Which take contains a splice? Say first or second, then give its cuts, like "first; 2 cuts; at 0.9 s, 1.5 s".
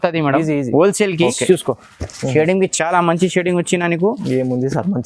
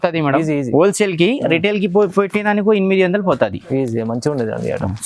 first; 1 cut; at 1.3 s